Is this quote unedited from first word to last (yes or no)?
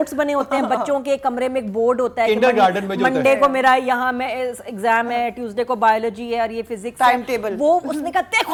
yes